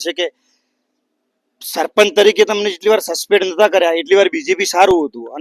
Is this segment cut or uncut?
uncut